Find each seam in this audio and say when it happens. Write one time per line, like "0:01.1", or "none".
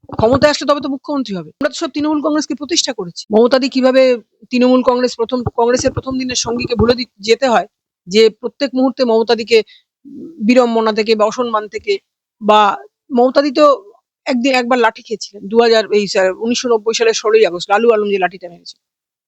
0:01.5
0:03.1